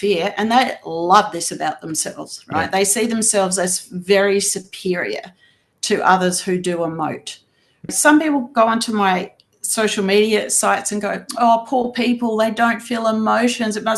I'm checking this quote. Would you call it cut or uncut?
cut